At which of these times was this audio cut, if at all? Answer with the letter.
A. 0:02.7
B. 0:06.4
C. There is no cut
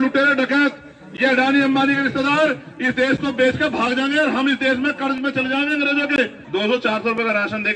B